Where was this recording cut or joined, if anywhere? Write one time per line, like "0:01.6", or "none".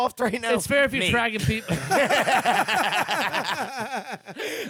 none